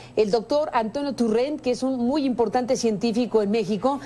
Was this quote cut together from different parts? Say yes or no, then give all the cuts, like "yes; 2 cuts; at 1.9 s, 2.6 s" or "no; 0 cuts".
no; 0 cuts